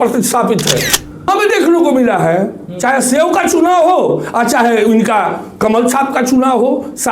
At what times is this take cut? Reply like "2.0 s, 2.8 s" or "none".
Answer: 1.3 s